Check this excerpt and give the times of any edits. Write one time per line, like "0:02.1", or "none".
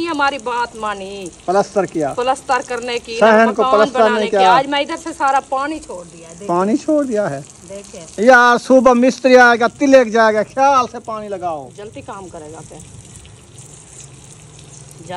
none